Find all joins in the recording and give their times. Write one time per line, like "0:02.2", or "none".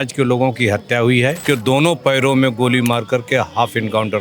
0:01.4